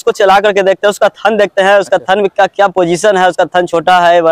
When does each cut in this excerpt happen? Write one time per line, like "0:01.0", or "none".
none